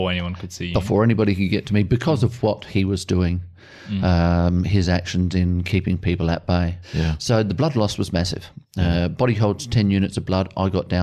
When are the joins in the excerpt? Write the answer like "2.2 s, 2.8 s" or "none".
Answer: 6.8 s